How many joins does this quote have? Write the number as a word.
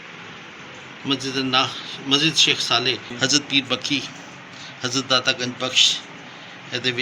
one